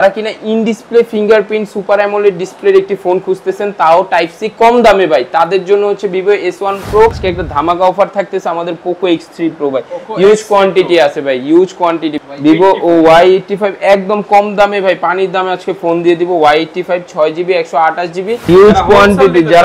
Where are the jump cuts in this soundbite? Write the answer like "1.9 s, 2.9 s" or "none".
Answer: 7.2 s, 12.1 s, 18.5 s